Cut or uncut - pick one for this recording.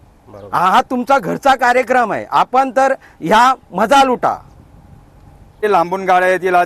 cut